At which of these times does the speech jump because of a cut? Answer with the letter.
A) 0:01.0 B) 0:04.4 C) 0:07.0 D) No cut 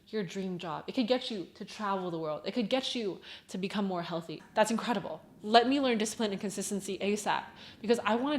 B